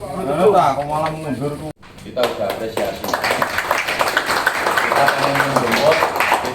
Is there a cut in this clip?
yes; 1 cut; at 1.7 s

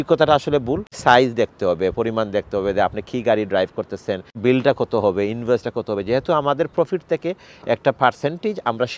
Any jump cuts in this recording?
yes; 2 cuts; at 1.0 s, 4.4 s

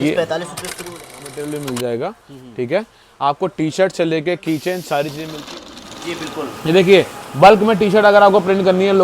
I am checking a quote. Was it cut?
yes; 2 cuts; at 1.1 s, 5.8 s

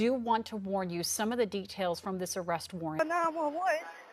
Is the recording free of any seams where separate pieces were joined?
no; 1 cut; at 3.0 s

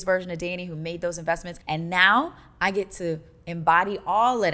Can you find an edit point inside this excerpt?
yes; 1 cut; at 1.5 s

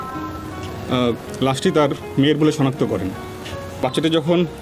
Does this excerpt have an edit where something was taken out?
yes; 1 cut; at 3.6 s

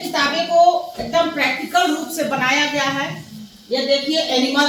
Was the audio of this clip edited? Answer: no; 0 cuts

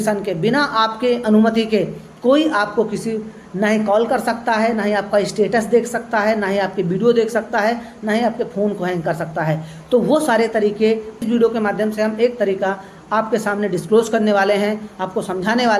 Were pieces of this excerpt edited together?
yes; 1 cut; at 11.2 s

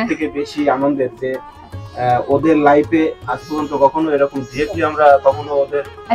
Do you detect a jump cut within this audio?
no; 0 cuts

